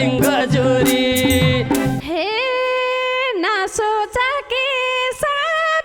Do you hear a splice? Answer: yes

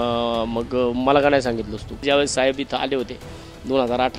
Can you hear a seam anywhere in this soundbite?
yes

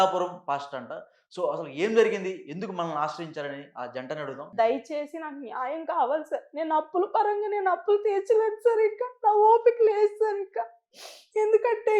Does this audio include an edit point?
yes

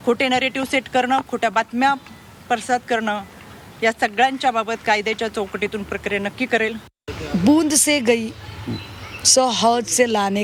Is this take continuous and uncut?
yes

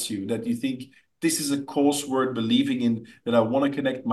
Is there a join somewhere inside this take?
no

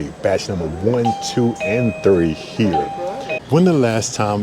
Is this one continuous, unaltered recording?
no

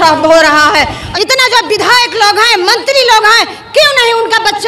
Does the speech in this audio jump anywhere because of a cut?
yes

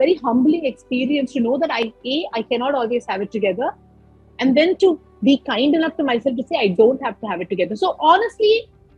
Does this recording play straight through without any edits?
yes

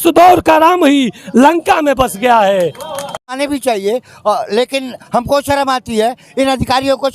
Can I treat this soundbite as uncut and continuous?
no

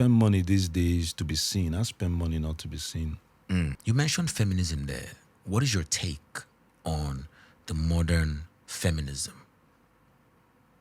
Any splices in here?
yes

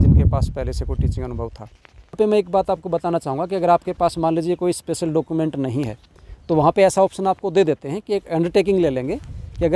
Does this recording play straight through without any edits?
no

